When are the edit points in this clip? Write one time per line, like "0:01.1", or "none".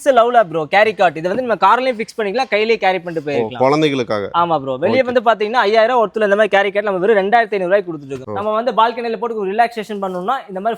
0:08.1